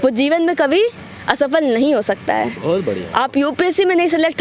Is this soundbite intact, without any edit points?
yes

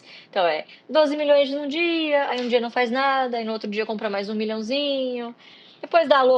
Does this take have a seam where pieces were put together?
no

